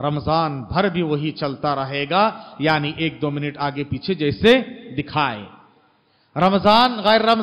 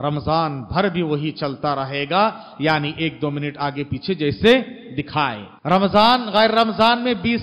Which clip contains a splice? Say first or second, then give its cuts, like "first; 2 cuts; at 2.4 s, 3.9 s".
second; 1 cut; at 5.5 s